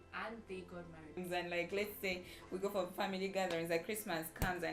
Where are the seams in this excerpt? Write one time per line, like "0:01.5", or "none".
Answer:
0:01.2

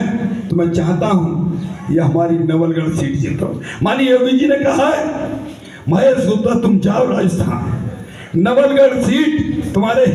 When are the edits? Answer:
none

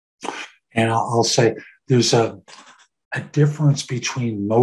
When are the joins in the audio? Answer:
none

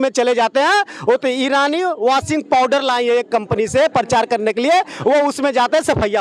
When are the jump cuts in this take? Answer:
none

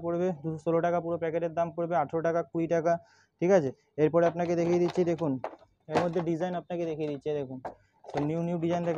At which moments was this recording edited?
none

